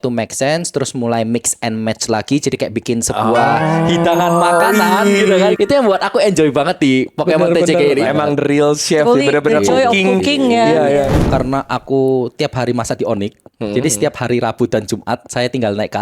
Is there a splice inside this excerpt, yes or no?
yes